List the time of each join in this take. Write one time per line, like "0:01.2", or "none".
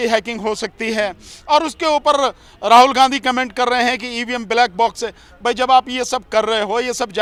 none